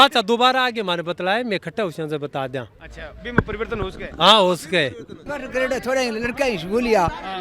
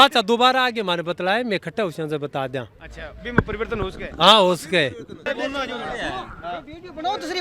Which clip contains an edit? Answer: first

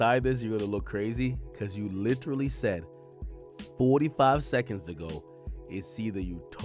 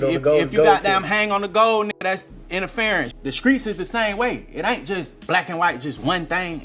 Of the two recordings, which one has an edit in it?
second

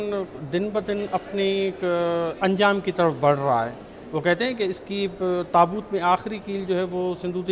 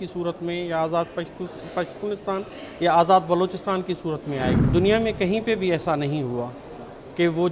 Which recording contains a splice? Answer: second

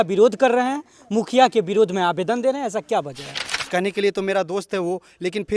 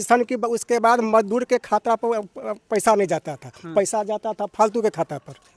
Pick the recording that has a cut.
first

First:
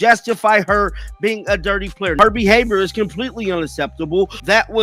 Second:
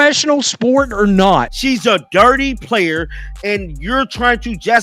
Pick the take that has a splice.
second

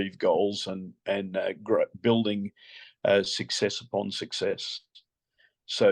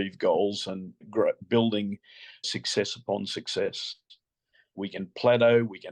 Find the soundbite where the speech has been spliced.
second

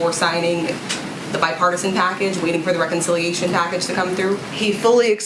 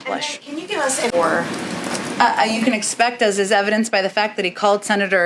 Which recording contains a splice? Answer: second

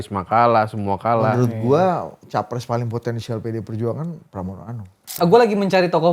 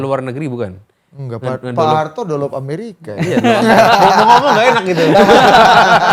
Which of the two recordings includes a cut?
first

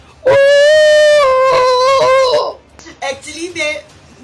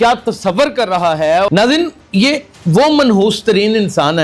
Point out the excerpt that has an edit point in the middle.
second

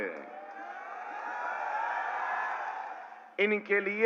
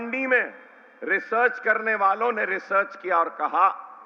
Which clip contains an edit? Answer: first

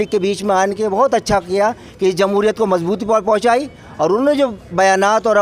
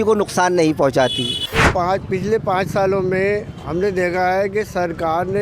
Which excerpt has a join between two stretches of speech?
second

